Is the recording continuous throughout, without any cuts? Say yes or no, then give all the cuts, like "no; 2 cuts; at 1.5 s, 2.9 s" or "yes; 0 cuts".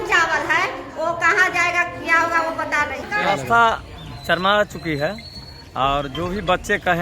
no; 1 cut; at 3.1 s